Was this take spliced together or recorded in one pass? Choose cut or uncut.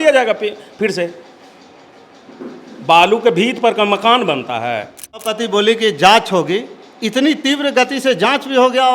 cut